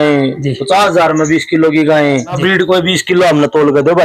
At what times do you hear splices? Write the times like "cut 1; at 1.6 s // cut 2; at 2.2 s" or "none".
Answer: cut 1; at 2.4 s

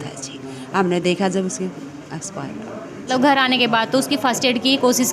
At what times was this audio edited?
cut 1; at 3.1 s

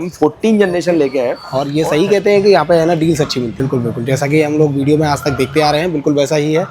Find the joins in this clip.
cut 1; at 1.4 s

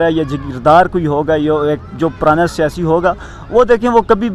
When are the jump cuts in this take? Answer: none

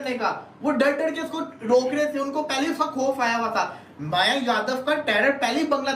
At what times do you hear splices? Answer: none

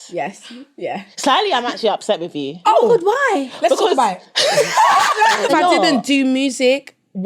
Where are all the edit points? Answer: cut 1; at 5.5 s

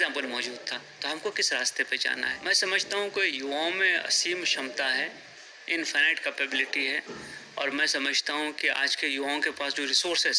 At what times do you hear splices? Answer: cut 1; at 2.3 s

